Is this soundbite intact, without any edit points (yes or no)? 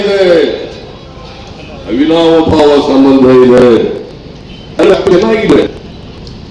yes